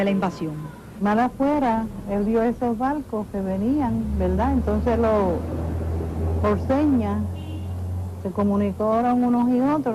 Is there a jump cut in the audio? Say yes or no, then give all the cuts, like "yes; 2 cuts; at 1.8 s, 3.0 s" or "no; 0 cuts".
yes; 1 cut; at 4.6 s